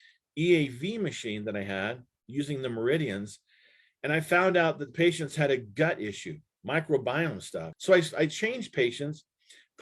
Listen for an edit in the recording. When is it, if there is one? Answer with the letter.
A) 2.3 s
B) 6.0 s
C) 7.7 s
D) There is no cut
C